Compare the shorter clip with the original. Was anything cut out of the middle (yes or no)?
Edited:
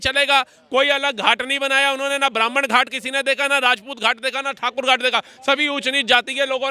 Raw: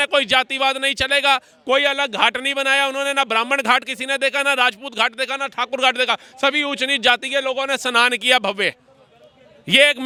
no